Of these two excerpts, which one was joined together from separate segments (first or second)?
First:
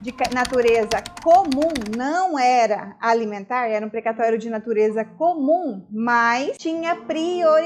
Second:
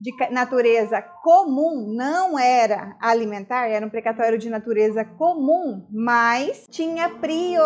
first